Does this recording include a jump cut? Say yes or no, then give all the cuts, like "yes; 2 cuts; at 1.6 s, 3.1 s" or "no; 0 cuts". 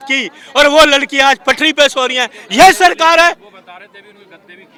no; 0 cuts